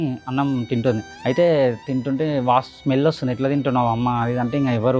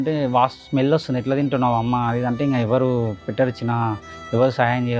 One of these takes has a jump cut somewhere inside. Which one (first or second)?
first